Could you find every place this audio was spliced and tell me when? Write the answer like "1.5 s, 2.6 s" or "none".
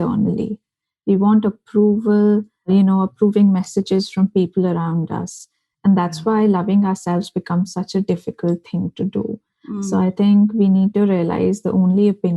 2.6 s